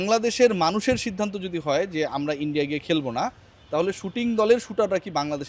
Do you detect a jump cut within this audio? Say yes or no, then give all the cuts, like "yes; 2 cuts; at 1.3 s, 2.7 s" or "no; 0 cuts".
no; 0 cuts